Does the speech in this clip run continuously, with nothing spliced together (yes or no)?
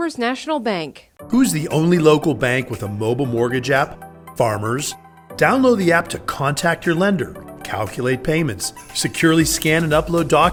yes